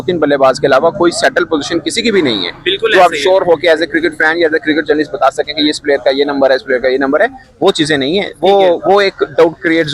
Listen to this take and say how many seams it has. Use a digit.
0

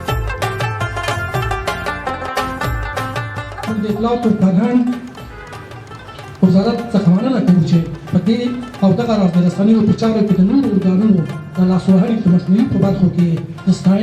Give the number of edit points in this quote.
1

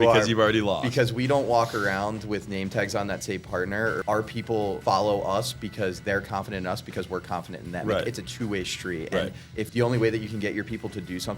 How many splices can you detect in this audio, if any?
2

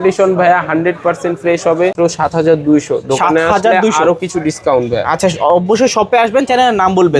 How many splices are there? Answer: 1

